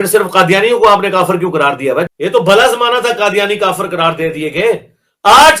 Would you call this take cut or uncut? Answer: cut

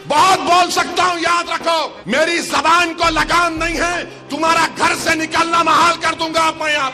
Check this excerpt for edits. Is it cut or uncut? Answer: cut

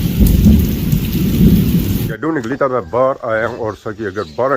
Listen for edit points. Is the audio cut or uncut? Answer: cut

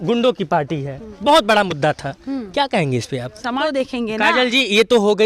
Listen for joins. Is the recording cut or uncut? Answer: cut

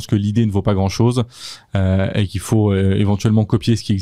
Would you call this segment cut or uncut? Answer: uncut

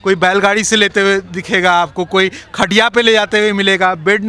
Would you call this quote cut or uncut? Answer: uncut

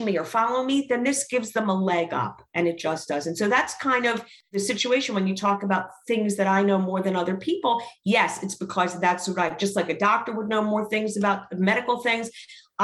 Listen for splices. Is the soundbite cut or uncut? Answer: cut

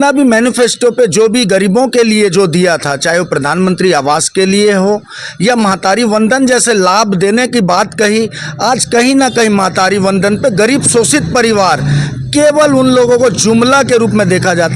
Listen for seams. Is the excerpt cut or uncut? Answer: uncut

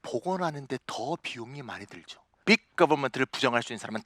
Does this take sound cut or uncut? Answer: cut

